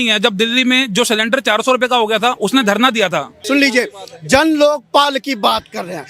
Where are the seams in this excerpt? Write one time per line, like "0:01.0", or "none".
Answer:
0:03.3